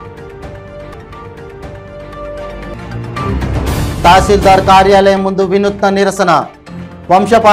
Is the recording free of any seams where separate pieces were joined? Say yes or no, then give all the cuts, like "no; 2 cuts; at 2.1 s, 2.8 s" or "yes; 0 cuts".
no; 1 cut; at 0.9 s